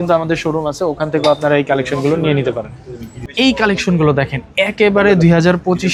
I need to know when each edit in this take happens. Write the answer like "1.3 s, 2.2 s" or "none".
none